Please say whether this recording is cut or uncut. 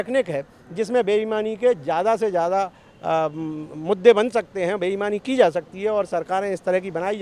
uncut